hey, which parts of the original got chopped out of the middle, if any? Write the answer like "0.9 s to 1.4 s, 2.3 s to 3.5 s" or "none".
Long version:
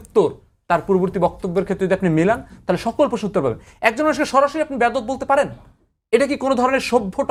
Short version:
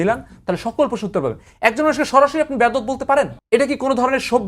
5.6 s to 6.0 s